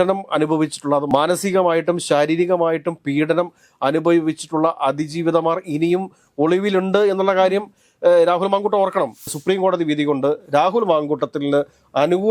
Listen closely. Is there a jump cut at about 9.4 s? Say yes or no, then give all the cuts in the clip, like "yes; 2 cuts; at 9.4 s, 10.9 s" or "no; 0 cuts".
yes; 1 cut; at 9.4 s